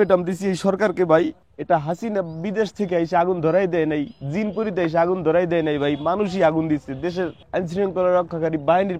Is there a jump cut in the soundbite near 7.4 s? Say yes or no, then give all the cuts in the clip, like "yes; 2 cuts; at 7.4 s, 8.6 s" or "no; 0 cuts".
yes; 2 cuts; at 1.5 s, 7.4 s